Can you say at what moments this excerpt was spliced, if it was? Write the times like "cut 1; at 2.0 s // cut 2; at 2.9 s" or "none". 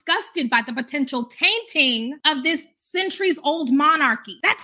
cut 1; at 2.2 s